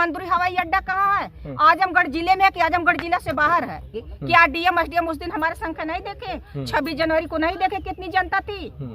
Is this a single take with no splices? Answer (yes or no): no